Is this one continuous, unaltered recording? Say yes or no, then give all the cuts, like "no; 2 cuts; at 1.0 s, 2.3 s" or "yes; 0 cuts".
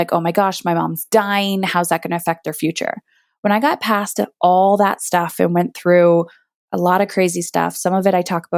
yes; 0 cuts